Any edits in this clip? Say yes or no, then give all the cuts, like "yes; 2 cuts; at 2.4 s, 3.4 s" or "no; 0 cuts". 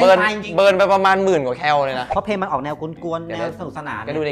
yes; 1 cut; at 2.0 s